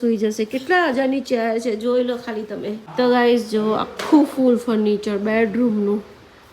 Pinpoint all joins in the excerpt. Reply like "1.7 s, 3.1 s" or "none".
2.8 s